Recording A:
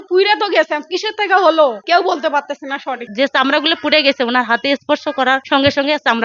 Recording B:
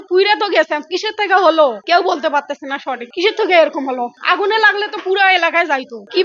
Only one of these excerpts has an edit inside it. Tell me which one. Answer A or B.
A